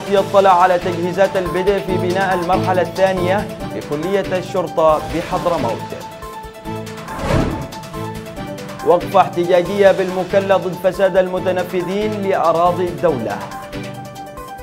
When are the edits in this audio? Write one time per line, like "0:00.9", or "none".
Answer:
none